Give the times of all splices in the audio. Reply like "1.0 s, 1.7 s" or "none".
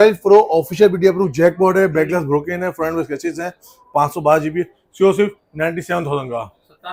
none